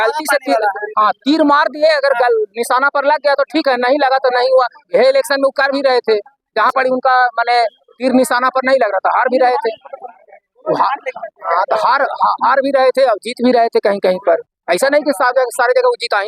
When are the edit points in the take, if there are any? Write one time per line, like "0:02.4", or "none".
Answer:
none